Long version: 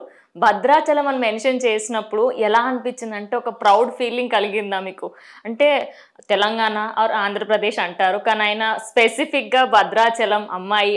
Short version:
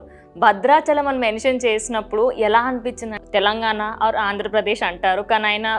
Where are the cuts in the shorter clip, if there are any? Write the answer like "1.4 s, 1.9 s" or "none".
3.1 s